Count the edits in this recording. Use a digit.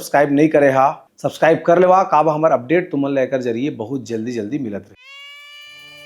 0